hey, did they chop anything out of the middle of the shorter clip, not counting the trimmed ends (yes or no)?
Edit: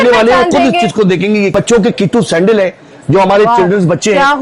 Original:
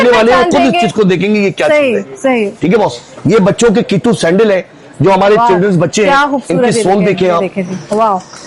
yes